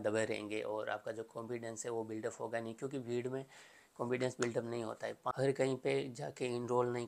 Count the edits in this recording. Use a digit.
1